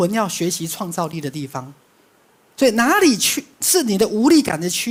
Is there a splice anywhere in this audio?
no; 0 cuts

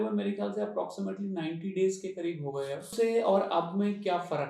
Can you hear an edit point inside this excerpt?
yes; 1 cut; at 2.9 s

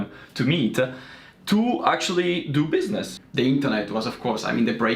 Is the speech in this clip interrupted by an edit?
yes; 1 cut; at 3.2 s

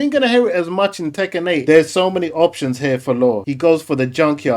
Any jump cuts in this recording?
yes; 1 cut; at 1.6 s

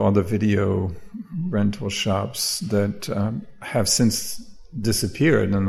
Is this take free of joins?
yes; 0 cuts

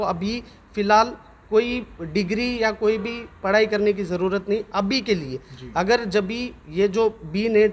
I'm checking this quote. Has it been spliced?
no; 0 cuts

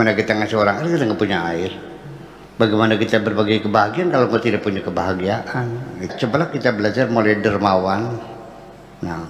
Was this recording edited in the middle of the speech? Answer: yes; 1 cut; at 6.1 s

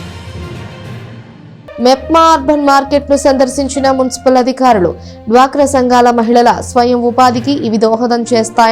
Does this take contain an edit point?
yes; 1 cut; at 1.8 s

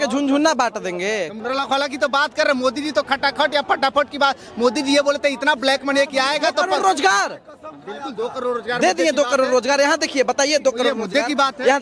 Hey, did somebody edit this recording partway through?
yes; 1 cut; at 1.3 s

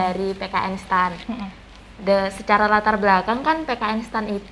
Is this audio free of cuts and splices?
yes; 0 cuts

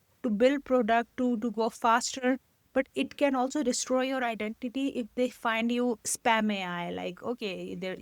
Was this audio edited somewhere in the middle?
no; 0 cuts

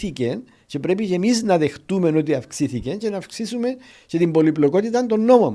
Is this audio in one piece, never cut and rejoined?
yes; 0 cuts

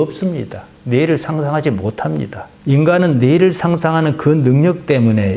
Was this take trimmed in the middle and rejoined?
no; 0 cuts

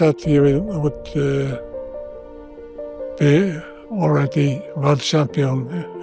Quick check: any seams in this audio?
no; 0 cuts

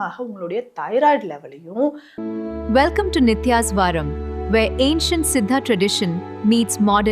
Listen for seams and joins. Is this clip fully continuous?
no; 1 cut; at 2.1 s

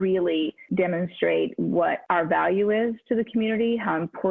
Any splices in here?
no; 0 cuts

